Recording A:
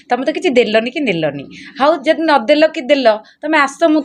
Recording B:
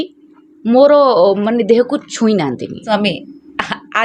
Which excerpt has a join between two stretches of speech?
B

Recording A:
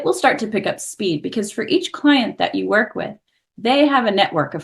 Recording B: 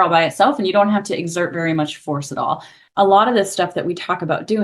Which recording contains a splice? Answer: B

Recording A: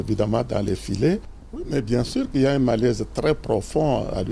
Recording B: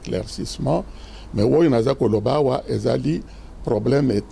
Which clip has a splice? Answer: A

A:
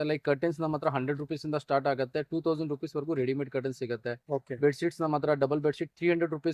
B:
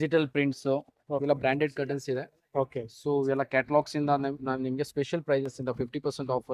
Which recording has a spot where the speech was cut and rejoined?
B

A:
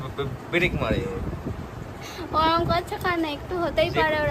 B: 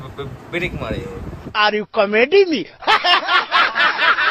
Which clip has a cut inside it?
A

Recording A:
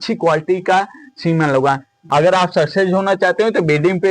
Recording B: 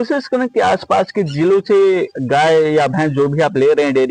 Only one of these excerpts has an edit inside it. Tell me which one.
A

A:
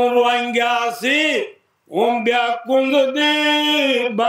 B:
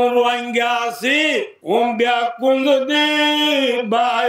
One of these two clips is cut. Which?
B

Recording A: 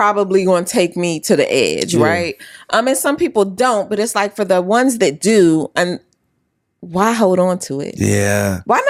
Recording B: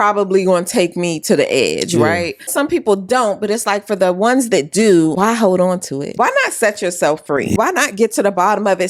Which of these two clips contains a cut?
B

